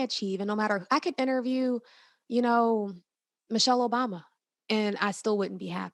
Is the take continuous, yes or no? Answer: yes